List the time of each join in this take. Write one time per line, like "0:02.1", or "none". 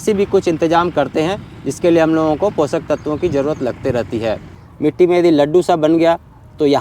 0:04.6